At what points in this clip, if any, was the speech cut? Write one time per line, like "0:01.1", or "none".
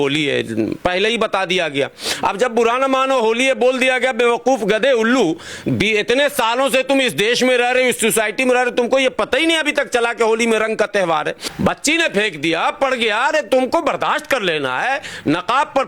0:11.4